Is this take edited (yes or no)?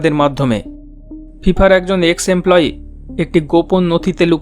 yes